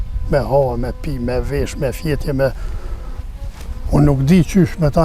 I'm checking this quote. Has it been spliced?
no; 0 cuts

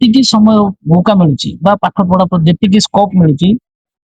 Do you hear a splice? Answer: no; 0 cuts

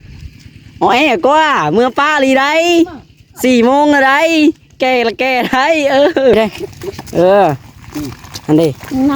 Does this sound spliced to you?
yes; 1 cut; at 6.3 s

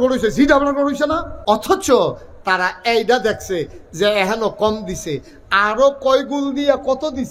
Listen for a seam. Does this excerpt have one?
yes; 1 cut; at 1.3 s

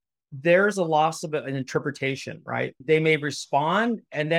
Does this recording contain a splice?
yes; 1 cut; at 2.8 s

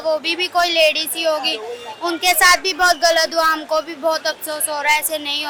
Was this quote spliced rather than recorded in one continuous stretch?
no; 0 cuts

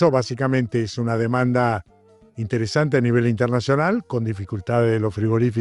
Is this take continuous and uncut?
yes; 0 cuts

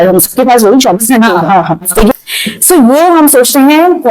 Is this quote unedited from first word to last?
no; 1 cut; at 2.1 s

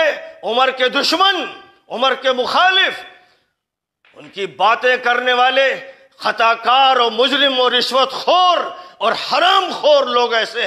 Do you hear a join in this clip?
no; 0 cuts

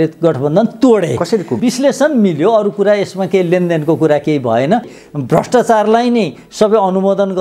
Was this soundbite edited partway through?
yes; 2 cuts; at 1.6 s, 4.9 s

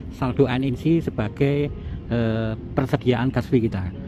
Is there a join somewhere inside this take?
no; 0 cuts

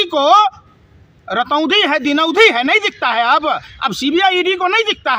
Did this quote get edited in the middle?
no; 0 cuts

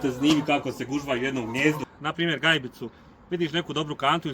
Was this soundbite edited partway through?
yes; 1 cut; at 1.9 s

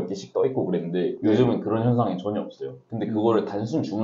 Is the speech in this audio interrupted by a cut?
no; 0 cuts

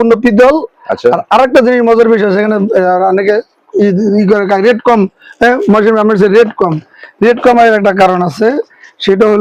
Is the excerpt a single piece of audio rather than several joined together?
yes; 0 cuts

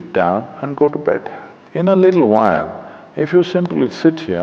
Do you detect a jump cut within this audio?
yes; 1 cut; at 1.0 s

